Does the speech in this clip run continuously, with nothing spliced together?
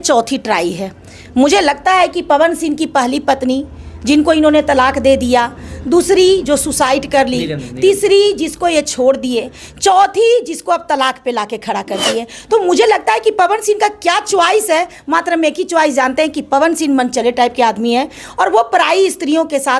yes; 0 cuts

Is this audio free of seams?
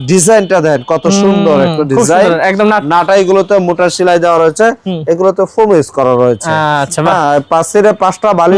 yes; 0 cuts

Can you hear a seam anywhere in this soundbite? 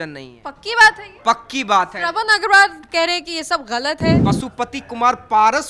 yes; 1 cut; at 4.2 s

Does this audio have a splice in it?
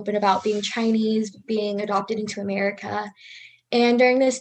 no; 0 cuts

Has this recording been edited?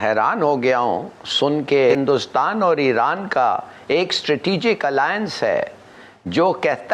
yes; 1 cut; at 2.0 s

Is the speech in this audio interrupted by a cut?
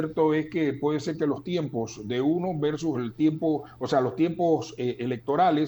no; 0 cuts

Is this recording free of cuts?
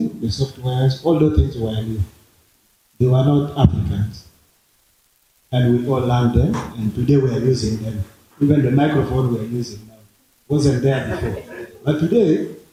yes; 0 cuts

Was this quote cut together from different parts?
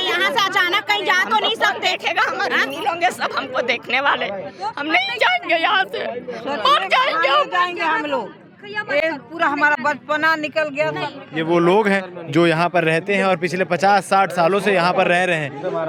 no; 0 cuts

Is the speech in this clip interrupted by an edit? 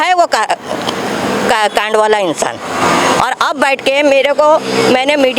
no; 0 cuts

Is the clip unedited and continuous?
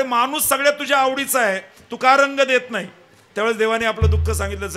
yes; 0 cuts

